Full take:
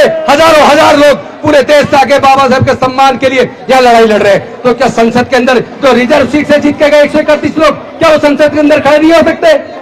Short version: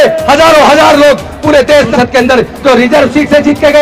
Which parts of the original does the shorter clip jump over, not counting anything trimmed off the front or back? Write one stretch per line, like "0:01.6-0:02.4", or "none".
0:01.9-0:05.1

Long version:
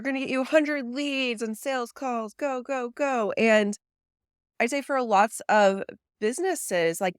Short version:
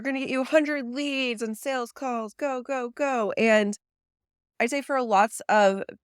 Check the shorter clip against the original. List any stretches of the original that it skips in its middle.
none

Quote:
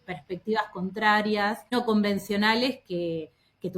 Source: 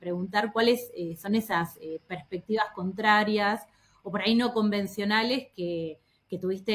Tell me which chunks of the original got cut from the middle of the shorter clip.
0:03.8-0:04.4

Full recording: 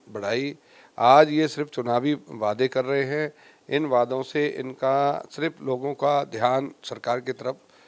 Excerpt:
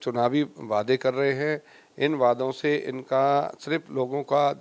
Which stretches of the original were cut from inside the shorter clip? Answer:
none

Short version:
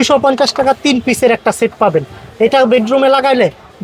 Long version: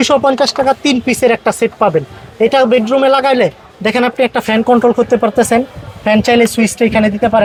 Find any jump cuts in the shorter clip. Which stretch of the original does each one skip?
none

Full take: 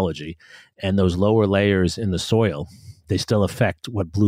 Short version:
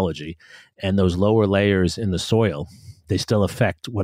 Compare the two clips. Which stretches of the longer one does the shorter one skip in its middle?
none

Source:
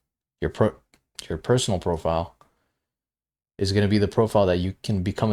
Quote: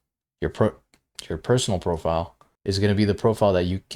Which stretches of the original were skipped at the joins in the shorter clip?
0:02.4-0:03.4

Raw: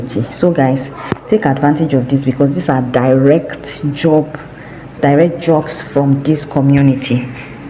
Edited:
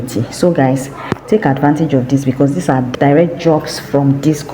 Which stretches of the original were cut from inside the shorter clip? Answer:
0:02.9-0:04.9

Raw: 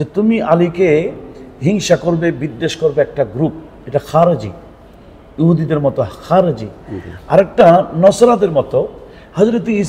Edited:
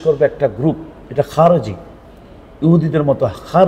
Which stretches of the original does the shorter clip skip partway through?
none

